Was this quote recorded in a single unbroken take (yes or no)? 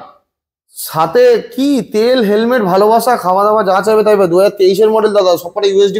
yes